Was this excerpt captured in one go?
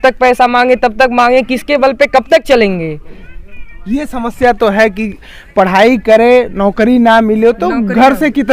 yes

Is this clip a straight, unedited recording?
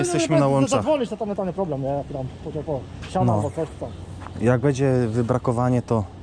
yes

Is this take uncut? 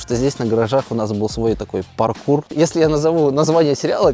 no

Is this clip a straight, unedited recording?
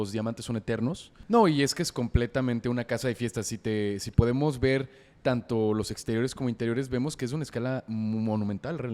no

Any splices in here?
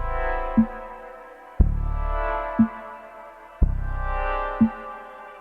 yes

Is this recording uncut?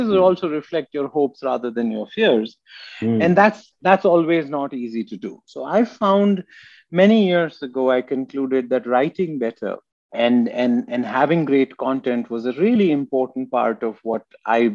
no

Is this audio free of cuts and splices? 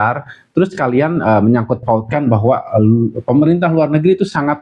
yes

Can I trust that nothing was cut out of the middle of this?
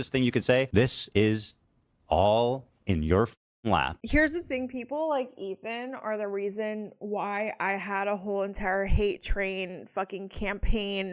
no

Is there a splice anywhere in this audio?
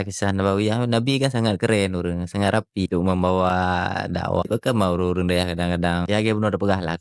yes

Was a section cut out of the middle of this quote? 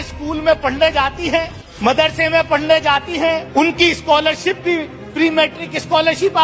yes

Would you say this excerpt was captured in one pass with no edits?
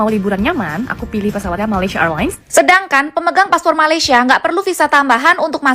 no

